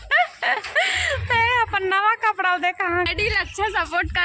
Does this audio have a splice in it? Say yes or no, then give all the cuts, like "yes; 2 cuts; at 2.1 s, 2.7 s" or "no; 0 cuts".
yes; 1 cut; at 3.1 s